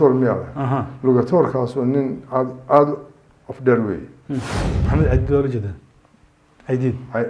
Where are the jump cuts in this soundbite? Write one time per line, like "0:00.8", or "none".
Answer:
0:04.8